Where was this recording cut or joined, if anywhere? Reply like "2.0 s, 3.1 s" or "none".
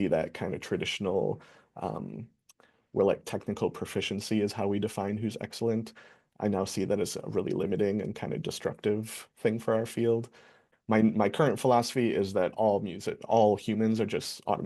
10.6 s